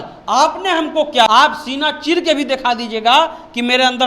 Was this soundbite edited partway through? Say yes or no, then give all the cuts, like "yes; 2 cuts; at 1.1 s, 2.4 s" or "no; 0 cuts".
yes; 1 cut; at 1.3 s